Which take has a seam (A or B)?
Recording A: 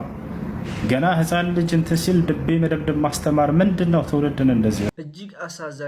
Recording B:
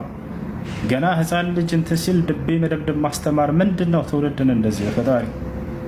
A